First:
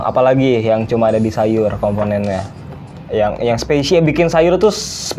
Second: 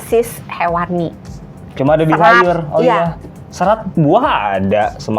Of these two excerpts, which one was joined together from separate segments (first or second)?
second